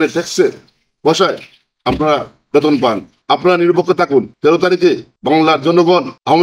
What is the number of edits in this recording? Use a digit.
3